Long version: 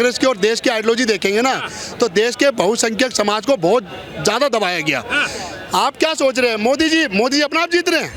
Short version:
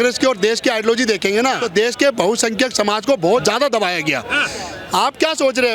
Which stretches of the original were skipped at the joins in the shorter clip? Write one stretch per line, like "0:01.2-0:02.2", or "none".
0:01.6-0:02.0
0:03.8-0:04.2